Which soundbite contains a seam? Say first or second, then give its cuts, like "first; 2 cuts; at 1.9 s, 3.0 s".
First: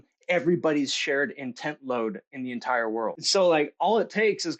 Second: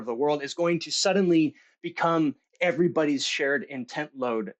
first; 1 cut; at 3.2 s